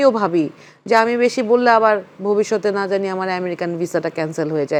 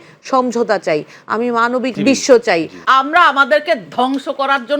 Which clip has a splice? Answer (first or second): second